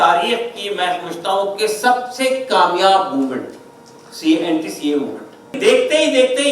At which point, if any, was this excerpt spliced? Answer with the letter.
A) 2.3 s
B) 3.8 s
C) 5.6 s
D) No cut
C